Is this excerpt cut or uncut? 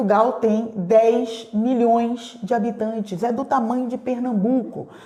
uncut